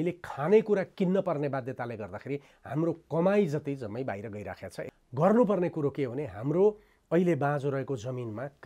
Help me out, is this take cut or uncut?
cut